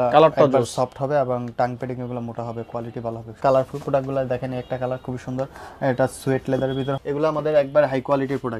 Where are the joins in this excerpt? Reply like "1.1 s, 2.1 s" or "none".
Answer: 3.4 s, 6.9 s